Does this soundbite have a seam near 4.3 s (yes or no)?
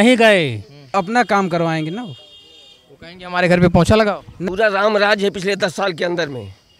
yes